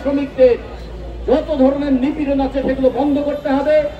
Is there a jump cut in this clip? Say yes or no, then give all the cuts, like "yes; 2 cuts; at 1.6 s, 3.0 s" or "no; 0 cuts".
no; 0 cuts